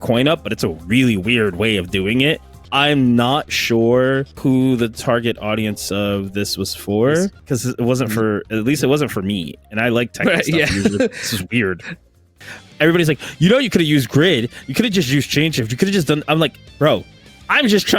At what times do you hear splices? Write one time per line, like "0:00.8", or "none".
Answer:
0:02.6
0:04.3
0:07.4
0:12.4